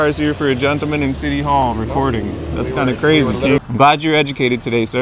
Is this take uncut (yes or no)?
no